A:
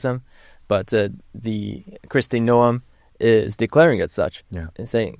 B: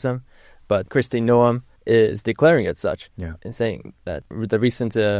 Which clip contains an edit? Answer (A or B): B